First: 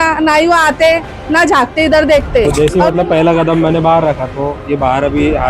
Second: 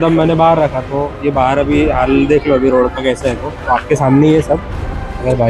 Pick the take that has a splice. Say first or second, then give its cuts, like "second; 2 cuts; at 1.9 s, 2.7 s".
first; 1 cut; at 2.5 s